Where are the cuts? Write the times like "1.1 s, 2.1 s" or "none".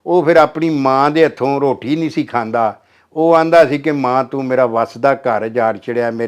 none